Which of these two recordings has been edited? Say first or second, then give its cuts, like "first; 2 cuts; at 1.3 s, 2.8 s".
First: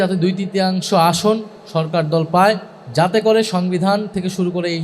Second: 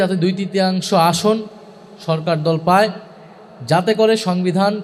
first; 2 cuts; at 1.6 s, 2.8 s